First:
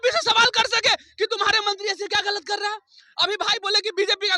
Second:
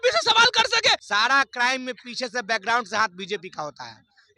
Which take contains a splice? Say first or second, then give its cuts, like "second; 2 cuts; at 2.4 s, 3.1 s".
second; 1 cut; at 1.0 s